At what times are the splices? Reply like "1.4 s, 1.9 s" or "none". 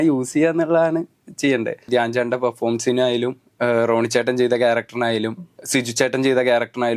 1.9 s